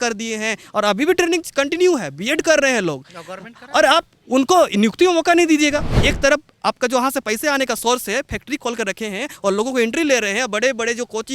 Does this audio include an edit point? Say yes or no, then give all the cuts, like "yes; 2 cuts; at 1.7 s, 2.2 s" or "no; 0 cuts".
yes; 1 cut; at 5.9 s